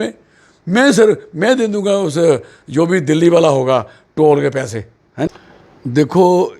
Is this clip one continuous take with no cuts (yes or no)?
no